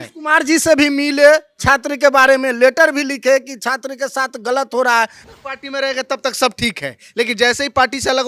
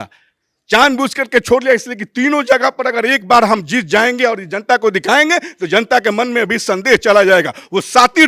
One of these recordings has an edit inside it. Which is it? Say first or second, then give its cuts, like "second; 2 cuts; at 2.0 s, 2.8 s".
first; 1 cut; at 5.2 s